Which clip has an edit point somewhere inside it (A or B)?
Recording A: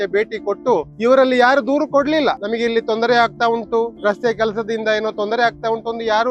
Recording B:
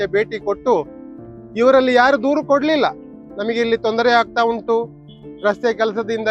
A